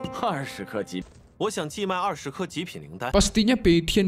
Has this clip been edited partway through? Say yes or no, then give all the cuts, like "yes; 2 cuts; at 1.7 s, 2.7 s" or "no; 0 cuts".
no; 0 cuts